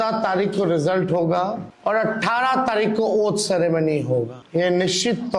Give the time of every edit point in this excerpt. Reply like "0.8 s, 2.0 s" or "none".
1.7 s, 4.4 s